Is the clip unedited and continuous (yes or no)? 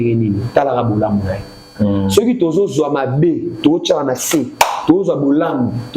no